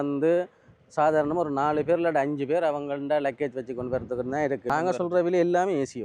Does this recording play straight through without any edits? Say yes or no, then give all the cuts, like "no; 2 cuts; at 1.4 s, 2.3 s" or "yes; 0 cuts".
no; 1 cut; at 4.7 s